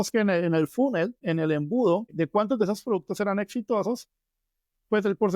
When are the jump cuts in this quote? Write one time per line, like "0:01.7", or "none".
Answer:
0:01.2
0:02.1